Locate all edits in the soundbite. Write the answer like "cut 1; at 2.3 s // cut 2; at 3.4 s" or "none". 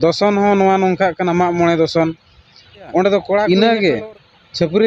cut 1; at 3.5 s